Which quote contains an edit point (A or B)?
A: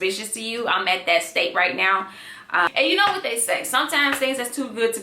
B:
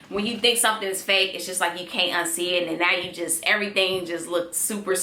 A